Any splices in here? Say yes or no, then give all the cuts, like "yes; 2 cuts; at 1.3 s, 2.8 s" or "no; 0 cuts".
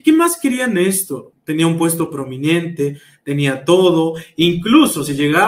yes; 1 cut; at 1.3 s